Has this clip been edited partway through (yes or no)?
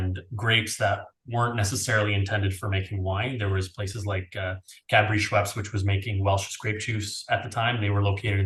no